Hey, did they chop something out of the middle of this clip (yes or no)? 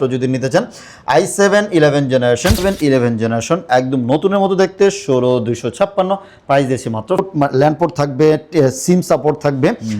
yes